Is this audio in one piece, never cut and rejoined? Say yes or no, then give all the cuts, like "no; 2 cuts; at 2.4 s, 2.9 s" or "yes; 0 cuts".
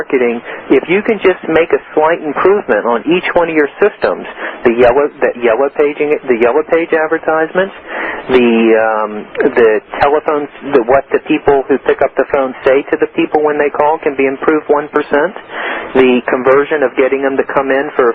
yes; 0 cuts